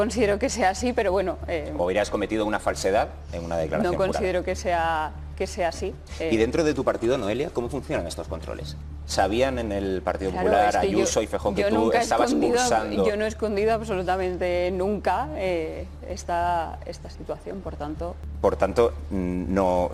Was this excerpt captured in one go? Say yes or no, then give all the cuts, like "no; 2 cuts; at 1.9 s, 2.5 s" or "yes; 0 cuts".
yes; 0 cuts